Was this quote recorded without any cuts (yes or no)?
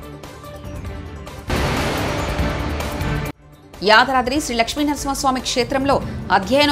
yes